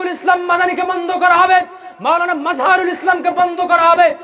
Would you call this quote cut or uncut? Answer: uncut